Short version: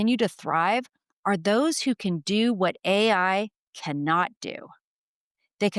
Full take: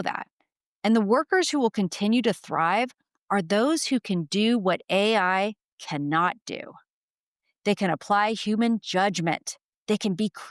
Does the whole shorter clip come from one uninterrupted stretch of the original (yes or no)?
yes